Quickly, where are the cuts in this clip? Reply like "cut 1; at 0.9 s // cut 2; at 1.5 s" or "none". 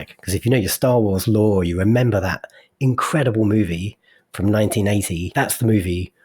cut 1; at 5.3 s